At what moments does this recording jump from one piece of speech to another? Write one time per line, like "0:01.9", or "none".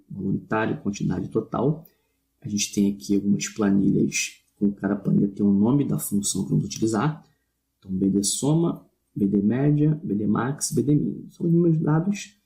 0:10.0